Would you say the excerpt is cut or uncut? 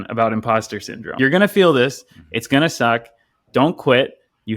cut